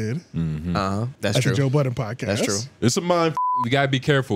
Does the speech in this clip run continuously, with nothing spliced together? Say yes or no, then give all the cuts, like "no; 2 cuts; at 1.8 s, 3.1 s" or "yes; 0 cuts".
no; 2 cuts; at 1.1 s, 3.4 s